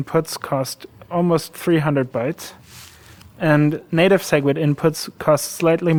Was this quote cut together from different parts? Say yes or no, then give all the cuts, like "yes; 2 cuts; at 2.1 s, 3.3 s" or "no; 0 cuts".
no; 0 cuts